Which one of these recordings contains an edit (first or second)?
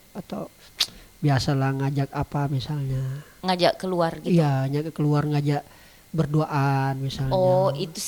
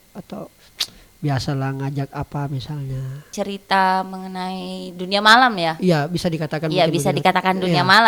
second